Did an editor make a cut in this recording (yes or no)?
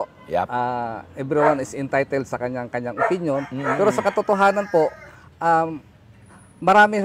no